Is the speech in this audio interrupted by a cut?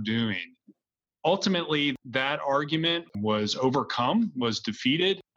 yes; 1 cut; at 3.0 s

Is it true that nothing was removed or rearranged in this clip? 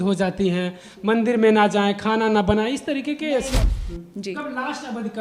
no; 1 cut; at 3.8 s

